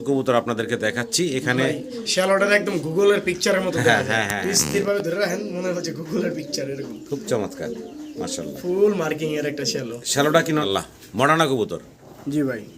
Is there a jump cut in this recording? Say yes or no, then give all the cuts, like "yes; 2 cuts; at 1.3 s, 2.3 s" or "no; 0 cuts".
yes; 1 cut; at 10.6 s